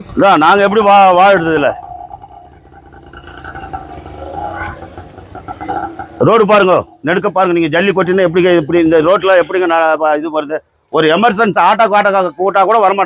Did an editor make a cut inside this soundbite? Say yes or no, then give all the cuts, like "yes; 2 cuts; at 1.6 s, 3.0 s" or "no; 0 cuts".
no; 0 cuts